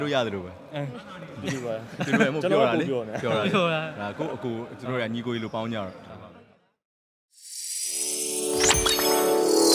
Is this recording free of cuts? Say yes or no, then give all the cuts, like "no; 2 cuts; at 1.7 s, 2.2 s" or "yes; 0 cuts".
no; 1 cut; at 6.7 s